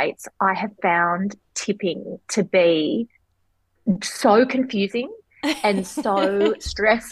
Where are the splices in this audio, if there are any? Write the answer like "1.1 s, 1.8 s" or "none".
none